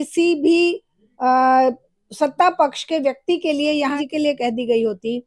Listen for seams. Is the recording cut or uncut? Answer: cut